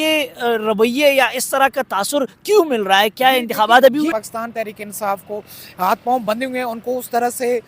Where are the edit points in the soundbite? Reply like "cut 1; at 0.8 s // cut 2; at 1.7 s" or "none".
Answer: cut 1; at 4.1 s